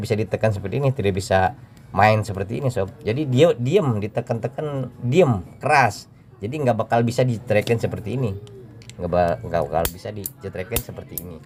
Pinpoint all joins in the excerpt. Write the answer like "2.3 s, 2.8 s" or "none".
none